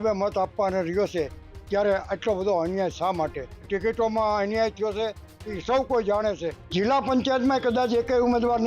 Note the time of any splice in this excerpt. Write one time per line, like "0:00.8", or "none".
0:03.7
0:06.6

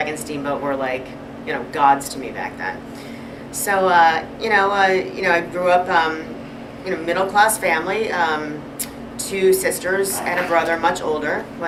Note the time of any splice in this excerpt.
none

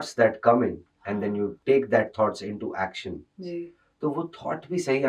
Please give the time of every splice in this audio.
0:01.6

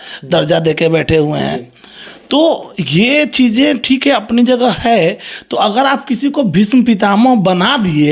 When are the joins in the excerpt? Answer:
none

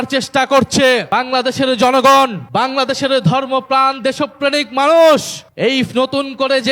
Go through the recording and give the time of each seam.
0:01.1
0:02.4
0:05.4

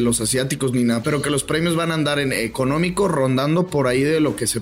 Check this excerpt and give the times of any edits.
0:01.0

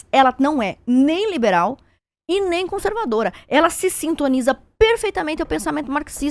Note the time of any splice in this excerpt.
none

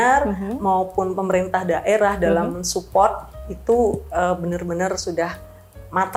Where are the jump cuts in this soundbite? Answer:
none

